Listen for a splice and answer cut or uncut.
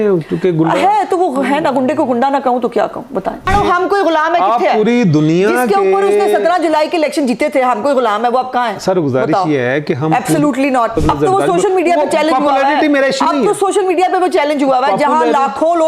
cut